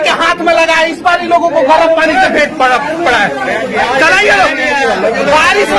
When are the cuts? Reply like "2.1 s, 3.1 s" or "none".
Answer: none